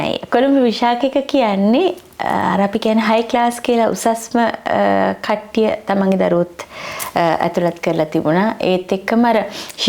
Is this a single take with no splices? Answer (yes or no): yes